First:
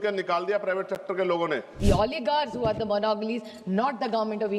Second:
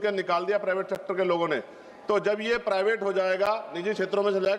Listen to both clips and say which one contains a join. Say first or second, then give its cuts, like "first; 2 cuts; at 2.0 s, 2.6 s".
first; 1 cut; at 1.8 s